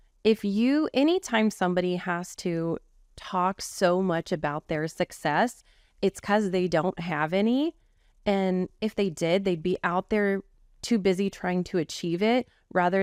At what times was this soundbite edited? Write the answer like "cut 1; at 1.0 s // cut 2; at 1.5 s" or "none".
none